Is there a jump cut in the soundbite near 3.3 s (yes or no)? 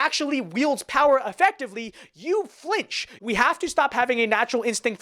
yes